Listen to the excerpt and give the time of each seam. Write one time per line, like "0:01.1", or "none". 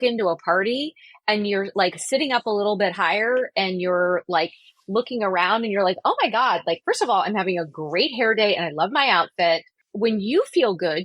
0:09.8